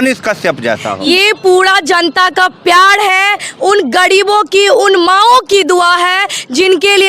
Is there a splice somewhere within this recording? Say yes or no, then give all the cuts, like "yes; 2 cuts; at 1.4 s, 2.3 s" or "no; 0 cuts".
yes; 1 cut; at 1.1 s